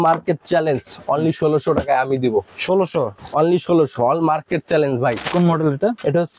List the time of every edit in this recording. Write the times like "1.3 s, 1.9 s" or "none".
5.3 s